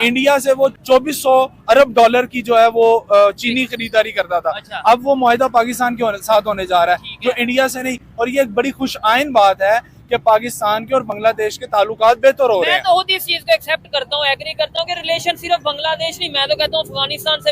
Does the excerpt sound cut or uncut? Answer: uncut